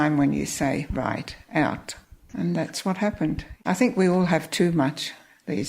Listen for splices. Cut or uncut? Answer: cut